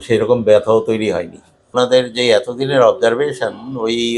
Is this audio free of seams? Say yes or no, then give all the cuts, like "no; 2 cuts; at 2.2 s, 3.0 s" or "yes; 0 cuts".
no; 1 cut; at 1.7 s